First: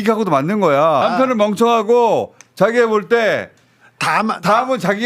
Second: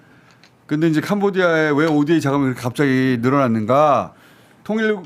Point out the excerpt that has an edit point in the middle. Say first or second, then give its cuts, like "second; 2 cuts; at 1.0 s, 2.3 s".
first; 1 cut; at 1.0 s